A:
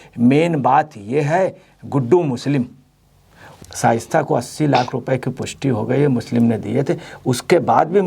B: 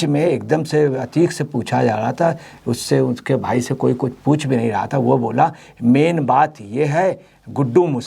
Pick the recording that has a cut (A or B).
A